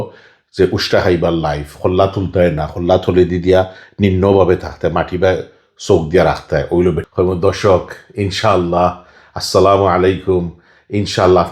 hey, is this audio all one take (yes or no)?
no